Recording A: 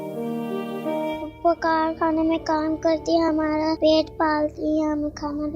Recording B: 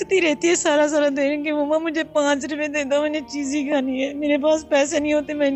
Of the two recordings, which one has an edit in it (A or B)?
A